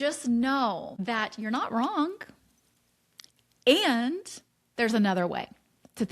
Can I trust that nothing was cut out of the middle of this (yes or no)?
no